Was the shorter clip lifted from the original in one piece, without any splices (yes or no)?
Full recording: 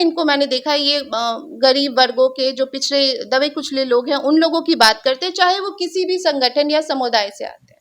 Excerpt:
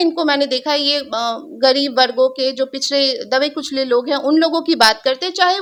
yes